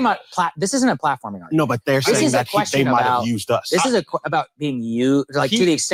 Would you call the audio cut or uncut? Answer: uncut